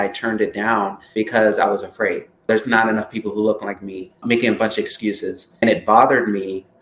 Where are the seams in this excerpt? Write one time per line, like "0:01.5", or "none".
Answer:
0:01.0
0:02.5
0:04.2
0:05.6